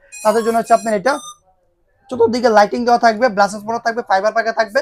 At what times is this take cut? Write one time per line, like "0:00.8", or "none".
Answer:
none